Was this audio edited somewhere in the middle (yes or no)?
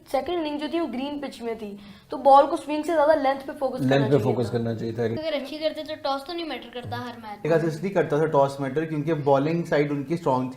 yes